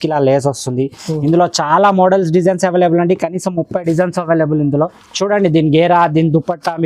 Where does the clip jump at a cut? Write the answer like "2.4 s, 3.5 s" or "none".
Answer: 5.0 s

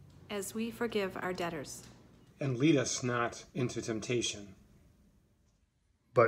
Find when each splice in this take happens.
5.4 s

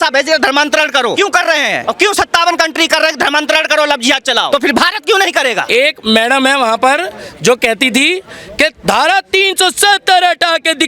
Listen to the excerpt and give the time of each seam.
1.3 s, 4.5 s, 5.6 s

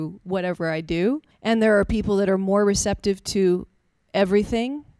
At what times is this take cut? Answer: 1.3 s

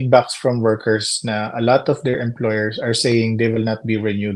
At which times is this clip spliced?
none

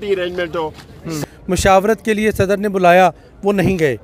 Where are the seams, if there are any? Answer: 1.2 s

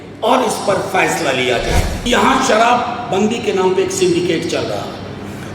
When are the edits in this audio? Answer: 1.9 s

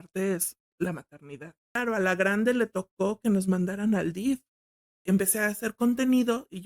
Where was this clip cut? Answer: 1.8 s, 5.0 s

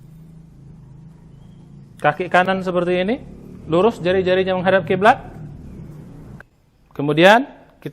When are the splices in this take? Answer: 6.3 s

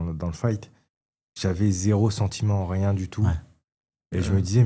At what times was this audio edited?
none

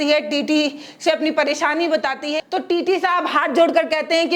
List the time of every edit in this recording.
2.3 s

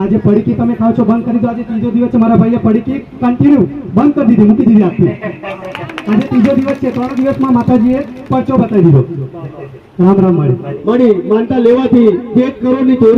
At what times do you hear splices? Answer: 10.7 s

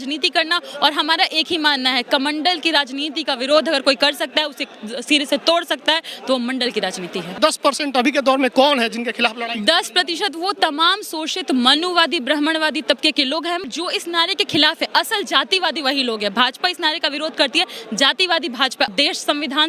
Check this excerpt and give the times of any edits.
7.3 s, 13.7 s, 18.9 s

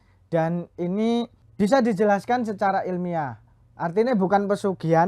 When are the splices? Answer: 1.4 s

